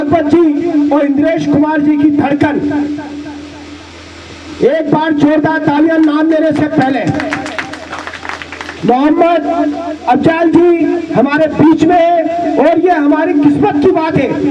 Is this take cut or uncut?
uncut